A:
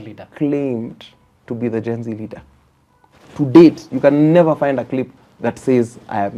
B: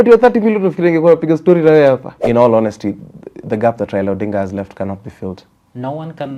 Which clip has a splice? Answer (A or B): B